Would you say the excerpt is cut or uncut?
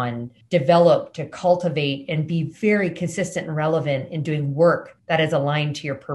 cut